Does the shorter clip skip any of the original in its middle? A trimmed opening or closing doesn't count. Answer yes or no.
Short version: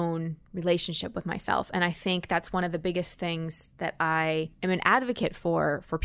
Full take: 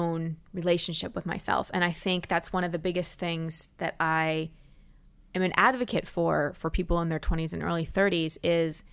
yes